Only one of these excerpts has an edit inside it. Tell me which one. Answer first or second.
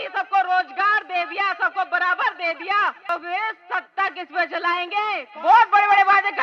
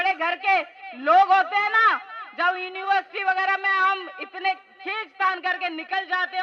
first